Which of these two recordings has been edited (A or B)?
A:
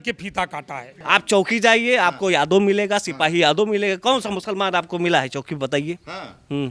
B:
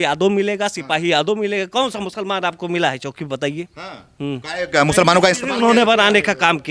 A